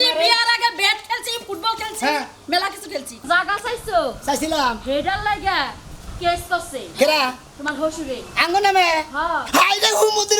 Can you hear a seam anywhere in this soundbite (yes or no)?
yes